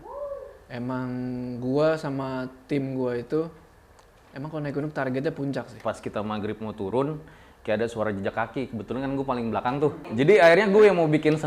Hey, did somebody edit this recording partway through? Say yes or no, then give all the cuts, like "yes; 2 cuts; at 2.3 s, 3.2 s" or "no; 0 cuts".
yes; 2 cuts; at 5.8 s, 10.0 s